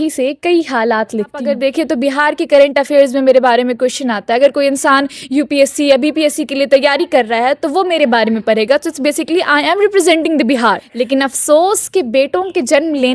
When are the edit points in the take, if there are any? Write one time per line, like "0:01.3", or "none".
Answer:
0:01.5
0:10.9